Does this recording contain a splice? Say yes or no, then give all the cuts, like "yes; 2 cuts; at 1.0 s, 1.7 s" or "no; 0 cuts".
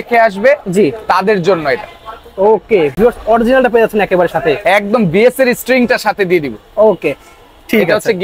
no; 0 cuts